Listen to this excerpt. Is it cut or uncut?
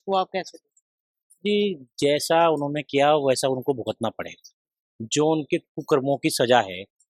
uncut